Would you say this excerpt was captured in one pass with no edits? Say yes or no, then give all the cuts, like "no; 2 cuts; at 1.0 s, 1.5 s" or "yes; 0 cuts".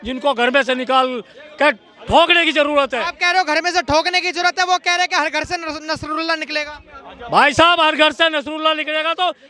yes; 0 cuts